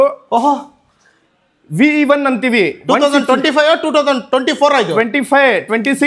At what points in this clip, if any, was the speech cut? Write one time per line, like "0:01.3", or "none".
none